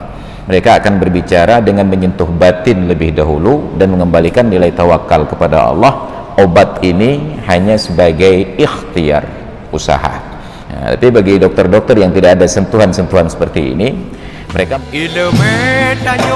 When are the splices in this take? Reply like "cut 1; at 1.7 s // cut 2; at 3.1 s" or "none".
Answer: cut 1; at 14.7 s